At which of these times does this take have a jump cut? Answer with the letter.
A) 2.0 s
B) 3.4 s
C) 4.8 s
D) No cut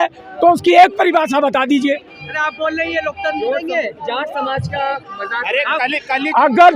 D